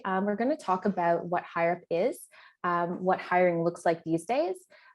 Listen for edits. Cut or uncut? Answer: uncut